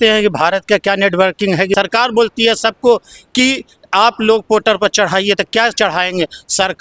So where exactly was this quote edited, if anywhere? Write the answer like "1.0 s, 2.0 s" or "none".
1.7 s